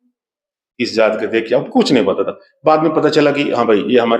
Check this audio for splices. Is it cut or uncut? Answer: uncut